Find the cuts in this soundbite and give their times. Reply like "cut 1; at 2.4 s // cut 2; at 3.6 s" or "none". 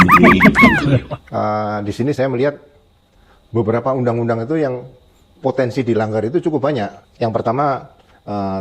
cut 1; at 1.0 s